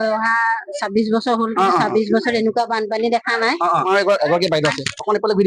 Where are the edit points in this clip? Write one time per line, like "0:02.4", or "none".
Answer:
0:03.9